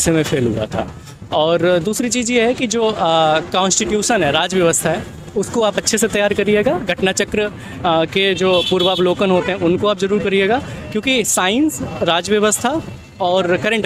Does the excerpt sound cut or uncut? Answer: uncut